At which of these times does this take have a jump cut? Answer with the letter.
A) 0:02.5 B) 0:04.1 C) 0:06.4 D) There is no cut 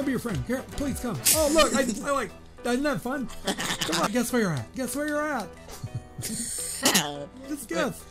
B